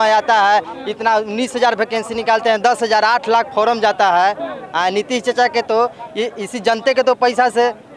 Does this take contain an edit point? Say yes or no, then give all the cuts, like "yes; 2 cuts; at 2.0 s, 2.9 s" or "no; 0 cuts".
no; 0 cuts